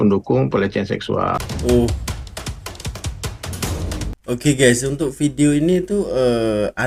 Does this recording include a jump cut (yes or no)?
no